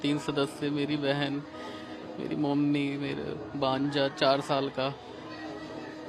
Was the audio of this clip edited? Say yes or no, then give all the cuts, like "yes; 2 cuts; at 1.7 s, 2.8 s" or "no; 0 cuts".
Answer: no; 0 cuts